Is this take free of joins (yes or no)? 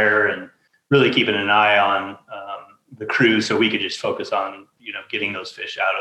yes